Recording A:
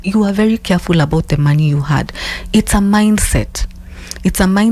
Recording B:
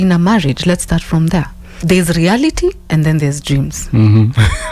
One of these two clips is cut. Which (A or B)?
B